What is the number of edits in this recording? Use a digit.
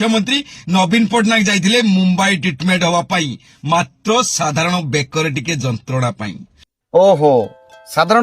1